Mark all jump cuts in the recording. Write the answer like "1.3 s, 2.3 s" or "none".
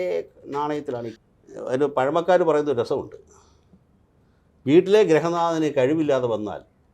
1.1 s

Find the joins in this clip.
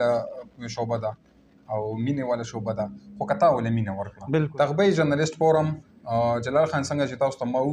4.5 s

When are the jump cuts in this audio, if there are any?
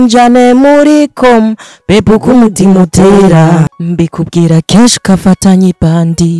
3.8 s

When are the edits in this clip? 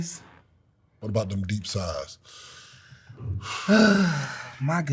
1.0 s

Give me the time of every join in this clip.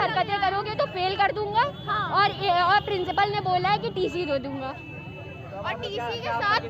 none

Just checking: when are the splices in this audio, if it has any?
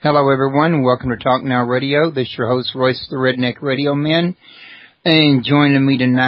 4.8 s

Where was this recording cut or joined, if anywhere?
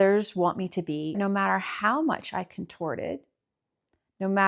1.2 s

